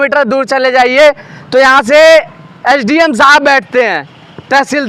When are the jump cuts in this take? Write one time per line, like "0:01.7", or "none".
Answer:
none